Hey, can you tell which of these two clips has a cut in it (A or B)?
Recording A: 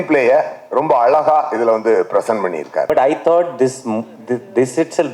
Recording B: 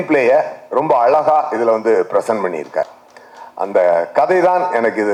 A